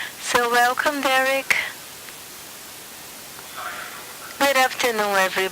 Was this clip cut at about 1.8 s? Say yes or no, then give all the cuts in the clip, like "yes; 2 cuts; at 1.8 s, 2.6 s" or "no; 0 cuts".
no; 1 cut; at 3.8 s